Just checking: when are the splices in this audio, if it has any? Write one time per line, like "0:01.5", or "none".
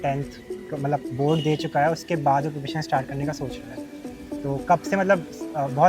none